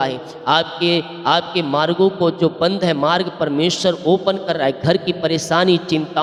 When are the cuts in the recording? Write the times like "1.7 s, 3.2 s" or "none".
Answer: none